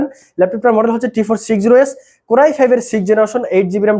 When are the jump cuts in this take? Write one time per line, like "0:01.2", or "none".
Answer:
none